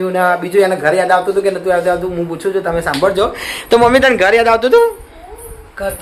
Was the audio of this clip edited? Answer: no; 0 cuts

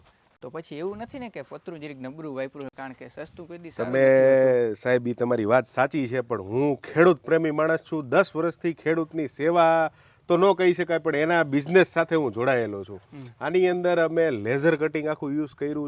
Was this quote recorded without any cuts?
yes; 0 cuts

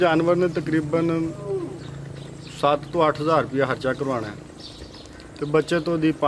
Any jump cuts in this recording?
no; 0 cuts

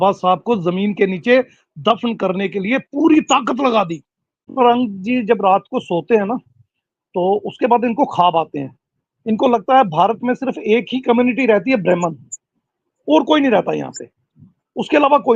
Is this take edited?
yes; 1 cut; at 4.5 s

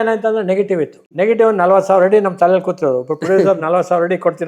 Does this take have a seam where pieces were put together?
yes; 1 cut; at 1.0 s

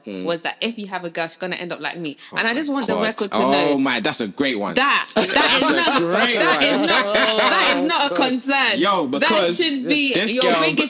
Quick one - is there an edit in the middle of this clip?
no; 0 cuts

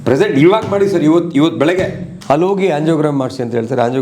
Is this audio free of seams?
no; 1 cut; at 2.1 s

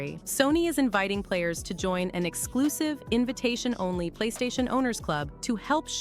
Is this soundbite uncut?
yes; 0 cuts

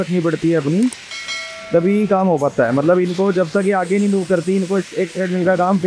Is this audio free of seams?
yes; 0 cuts

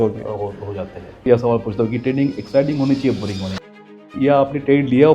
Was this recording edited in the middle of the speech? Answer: yes; 2 cuts; at 1.3 s, 3.9 s

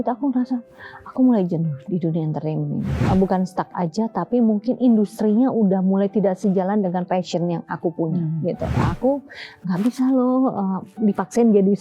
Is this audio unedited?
no; 2 cuts; at 3.0 s, 8.9 s

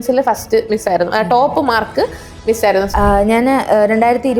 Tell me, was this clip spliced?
yes; 1 cut; at 2.9 s

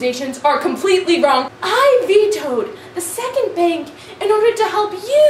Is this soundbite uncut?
no; 1 cut; at 1.6 s

